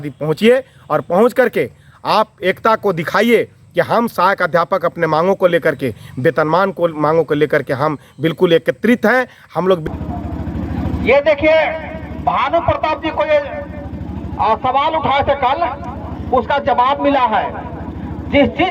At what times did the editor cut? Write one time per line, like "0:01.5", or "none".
0:09.8